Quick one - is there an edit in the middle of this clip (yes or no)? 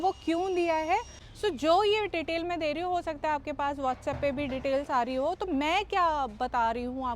yes